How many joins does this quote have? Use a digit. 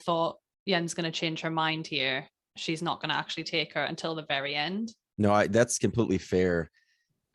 1